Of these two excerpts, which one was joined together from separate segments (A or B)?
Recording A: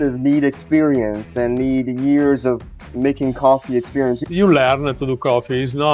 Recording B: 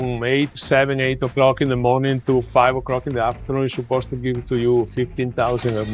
A